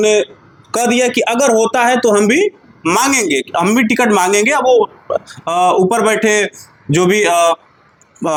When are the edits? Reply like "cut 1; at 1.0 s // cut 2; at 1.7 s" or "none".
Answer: none